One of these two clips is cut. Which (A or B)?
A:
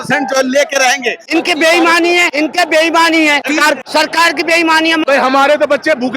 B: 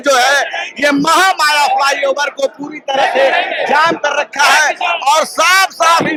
A